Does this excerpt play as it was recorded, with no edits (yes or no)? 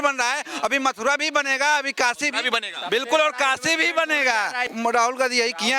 no